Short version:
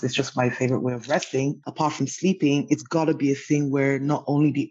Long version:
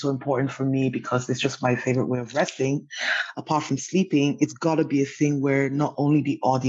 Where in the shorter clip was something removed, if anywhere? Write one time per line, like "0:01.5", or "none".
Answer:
0:01.6